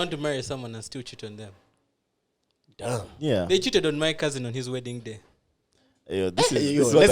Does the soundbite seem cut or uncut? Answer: uncut